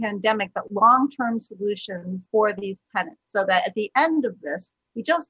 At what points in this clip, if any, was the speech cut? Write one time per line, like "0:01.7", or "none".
none